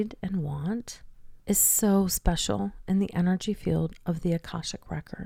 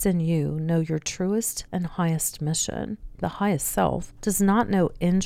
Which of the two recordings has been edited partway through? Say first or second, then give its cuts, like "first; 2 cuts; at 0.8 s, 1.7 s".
second; 3 cuts; at 1.6 s, 3.1 s, 4.1 s